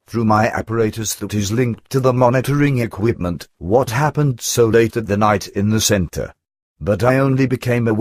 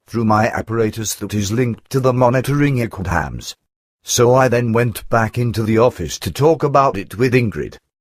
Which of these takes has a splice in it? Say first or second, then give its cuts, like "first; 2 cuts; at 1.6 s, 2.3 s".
first; 1 cut; at 2.9 s